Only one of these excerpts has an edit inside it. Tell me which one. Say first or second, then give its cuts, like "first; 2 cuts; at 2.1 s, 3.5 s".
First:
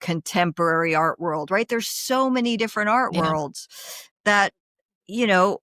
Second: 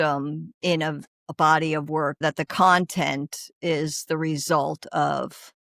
second; 2 cuts; at 1.1 s, 2.2 s